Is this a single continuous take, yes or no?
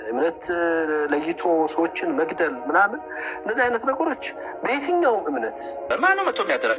no